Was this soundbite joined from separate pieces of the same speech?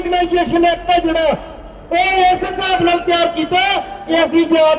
no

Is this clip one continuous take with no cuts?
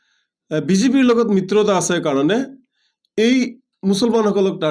yes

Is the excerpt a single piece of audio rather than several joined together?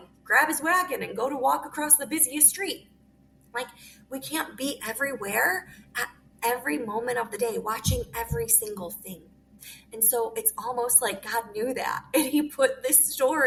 yes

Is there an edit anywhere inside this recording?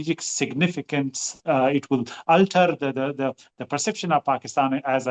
no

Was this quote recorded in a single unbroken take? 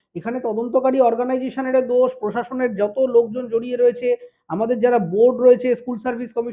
yes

